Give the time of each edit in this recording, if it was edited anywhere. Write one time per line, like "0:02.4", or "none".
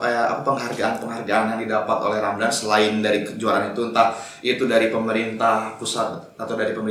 none